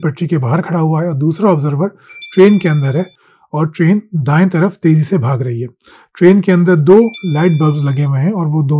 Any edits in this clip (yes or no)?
no